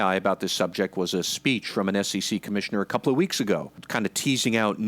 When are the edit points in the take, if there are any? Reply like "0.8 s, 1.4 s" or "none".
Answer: 3.8 s

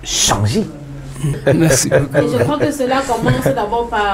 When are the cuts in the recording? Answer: 1.4 s

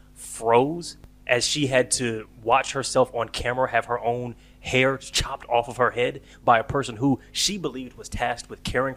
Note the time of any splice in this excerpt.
none

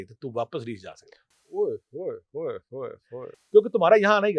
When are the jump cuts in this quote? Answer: none

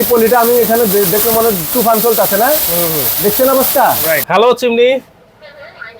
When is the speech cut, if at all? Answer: 4.2 s

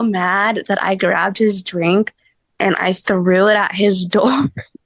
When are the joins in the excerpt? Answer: none

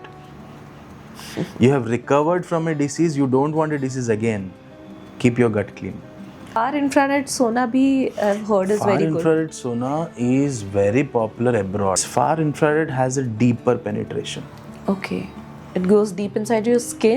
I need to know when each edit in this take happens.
6.6 s, 12.1 s

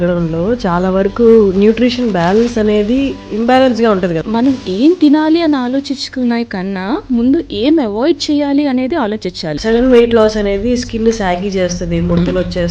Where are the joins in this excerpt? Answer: 3.2 s, 4.2 s, 9.5 s

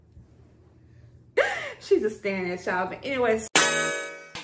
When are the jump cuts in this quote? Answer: 3.5 s

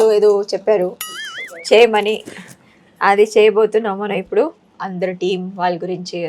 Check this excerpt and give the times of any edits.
4.6 s

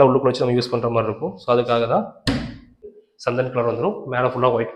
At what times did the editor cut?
2.9 s

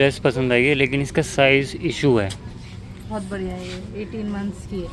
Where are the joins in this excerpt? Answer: none

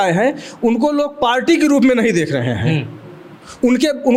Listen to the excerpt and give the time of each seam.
none

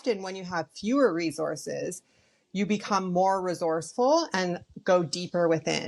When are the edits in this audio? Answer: none

